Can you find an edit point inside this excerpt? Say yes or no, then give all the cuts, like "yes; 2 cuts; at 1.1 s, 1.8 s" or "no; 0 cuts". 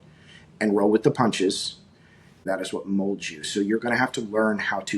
yes; 1 cut; at 2.4 s